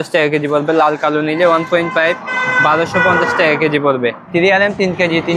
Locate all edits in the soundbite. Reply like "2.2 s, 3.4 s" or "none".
4.2 s